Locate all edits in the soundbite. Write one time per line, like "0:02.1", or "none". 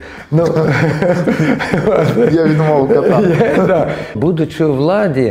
0:04.1